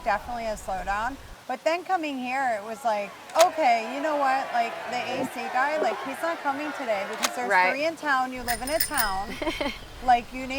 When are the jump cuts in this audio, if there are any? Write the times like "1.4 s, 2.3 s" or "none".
3.2 s